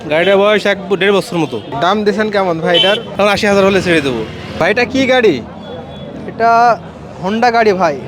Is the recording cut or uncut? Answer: cut